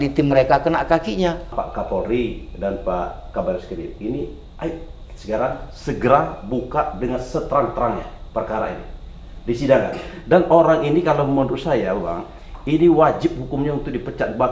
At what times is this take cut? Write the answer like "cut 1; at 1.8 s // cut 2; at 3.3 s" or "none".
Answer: cut 1; at 1.5 s